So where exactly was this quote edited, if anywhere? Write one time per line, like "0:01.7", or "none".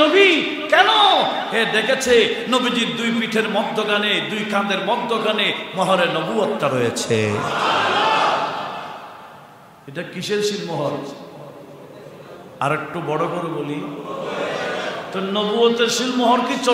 none